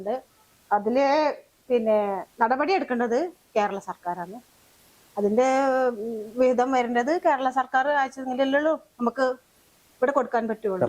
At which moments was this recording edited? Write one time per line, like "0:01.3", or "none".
none